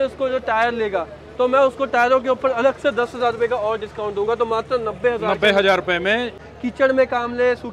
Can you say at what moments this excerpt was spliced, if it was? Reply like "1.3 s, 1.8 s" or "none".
6.4 s